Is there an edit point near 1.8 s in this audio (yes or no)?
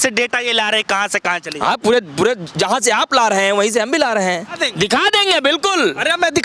no